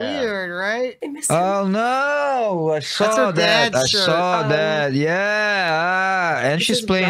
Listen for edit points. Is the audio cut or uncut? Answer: cut